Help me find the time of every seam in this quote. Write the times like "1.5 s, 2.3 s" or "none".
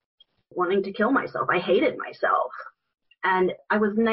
none